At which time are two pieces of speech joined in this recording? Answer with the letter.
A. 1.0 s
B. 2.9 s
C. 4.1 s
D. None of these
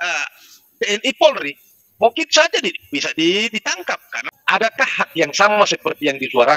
C